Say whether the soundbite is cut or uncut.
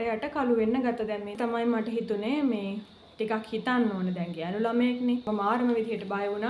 cut